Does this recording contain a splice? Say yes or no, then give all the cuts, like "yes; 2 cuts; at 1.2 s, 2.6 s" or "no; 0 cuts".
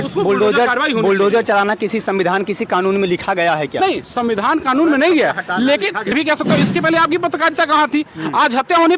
yes; 1 cut; at 6.1 s